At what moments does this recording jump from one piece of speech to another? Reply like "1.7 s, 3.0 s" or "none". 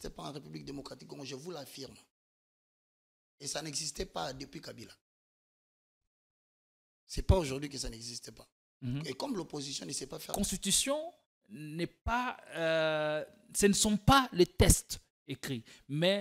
10.3 s